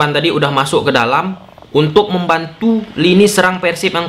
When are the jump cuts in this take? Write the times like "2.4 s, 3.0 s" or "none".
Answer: none